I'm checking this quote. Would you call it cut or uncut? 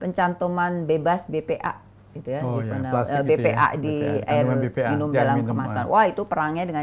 uncut